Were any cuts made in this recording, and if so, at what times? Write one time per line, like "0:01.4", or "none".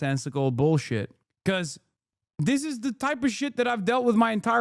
0:01.2